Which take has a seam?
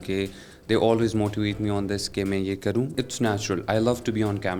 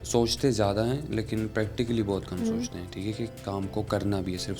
first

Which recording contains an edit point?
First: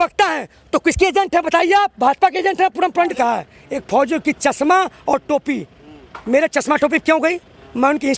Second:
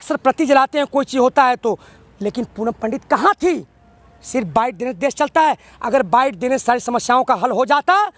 first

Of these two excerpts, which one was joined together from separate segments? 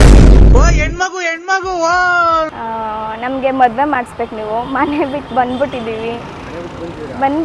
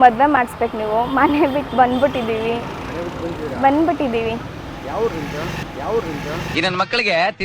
first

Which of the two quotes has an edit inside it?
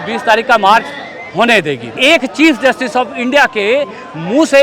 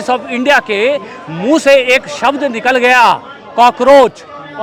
first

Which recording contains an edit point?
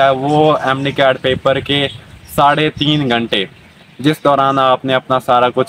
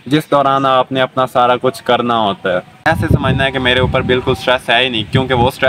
second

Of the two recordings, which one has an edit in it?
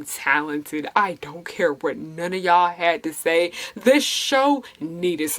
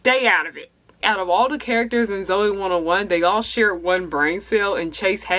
second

